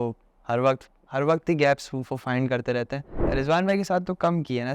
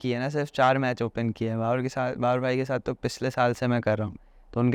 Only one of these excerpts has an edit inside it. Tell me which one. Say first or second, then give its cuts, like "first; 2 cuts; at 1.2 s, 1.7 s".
first; 1 cut; at 3.2 s